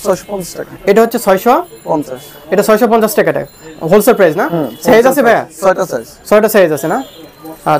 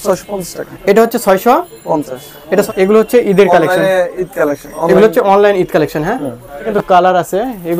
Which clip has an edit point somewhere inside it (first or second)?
second